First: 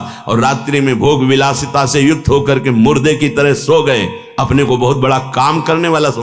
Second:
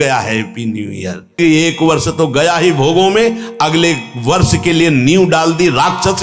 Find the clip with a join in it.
second; 1 cut; at 1.4 s

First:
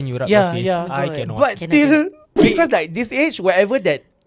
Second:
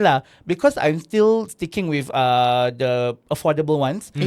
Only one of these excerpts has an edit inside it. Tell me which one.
first; 1 cut; at 2.3 s

